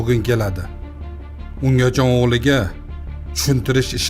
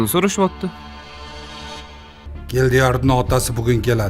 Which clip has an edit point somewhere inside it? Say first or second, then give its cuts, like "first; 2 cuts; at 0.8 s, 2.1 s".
second; 1 cut; at 2.3 s